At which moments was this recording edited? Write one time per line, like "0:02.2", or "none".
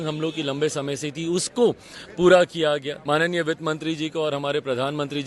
0:02.9